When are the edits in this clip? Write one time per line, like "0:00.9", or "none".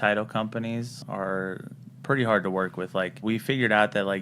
0:01.0
0:03.2